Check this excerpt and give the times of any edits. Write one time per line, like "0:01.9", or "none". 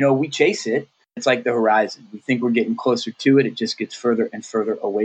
0:01.2